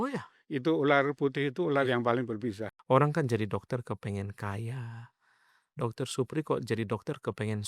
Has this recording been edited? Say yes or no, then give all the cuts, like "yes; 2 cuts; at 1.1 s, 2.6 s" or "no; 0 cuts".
yes; 1 cut; at 2.7 s